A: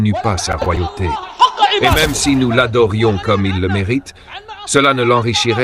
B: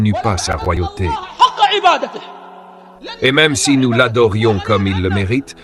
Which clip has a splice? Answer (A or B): A